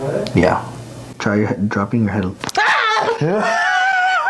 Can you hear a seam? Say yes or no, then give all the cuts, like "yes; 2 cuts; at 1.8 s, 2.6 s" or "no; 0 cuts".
no; 0 cuts